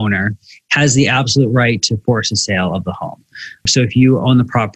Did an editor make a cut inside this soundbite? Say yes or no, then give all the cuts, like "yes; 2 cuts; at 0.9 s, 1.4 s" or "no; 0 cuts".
yes; 1 cut; at 3.7 s